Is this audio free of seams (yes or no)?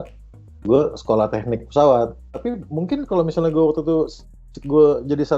no